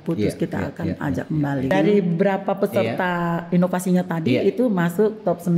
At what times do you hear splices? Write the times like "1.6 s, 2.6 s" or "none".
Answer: 1.7 s